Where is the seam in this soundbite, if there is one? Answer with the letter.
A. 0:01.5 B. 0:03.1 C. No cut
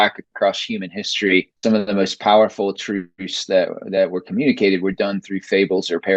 A